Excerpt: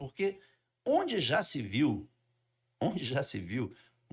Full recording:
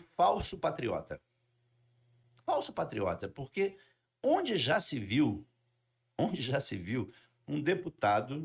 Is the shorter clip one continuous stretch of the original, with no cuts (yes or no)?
yes